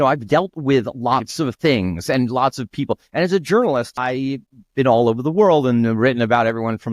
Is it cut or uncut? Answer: cut